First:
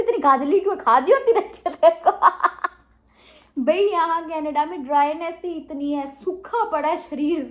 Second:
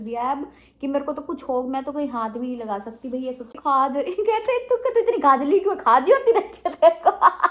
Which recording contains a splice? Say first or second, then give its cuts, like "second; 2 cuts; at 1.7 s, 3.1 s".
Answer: second; 1 cut; at 3.6 s